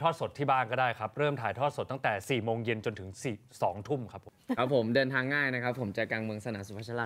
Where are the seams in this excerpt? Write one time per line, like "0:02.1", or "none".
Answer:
0:04.2